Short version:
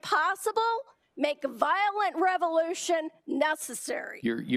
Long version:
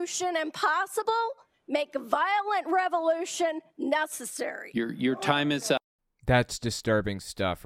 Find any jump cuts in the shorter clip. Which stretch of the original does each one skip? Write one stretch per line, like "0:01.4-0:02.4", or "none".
none